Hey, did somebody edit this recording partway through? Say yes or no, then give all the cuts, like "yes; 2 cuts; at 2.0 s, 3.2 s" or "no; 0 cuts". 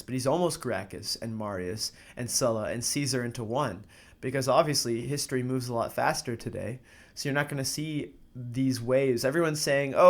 no; 0 cuts